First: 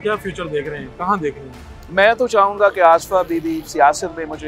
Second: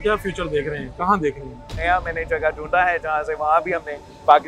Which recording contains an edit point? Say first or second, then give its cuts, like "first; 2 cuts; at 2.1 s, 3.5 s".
second; 1 cut; at 1.7 s